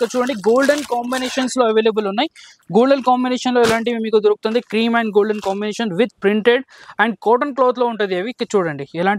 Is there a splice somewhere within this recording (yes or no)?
no